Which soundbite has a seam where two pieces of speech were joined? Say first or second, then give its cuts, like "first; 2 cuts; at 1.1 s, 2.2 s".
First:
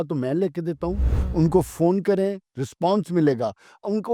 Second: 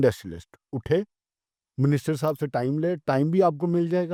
first; 1 cut; at 1.1 s